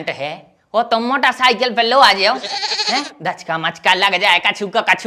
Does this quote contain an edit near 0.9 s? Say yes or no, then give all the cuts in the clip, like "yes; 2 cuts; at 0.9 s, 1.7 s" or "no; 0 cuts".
no; 0 cuts